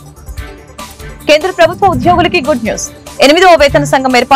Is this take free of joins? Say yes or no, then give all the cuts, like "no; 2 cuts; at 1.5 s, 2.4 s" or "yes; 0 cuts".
yes; 0 cuts